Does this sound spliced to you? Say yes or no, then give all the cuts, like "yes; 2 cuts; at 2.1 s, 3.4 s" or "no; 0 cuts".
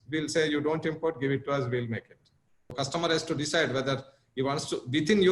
yes; 1 cut; at 2.7 s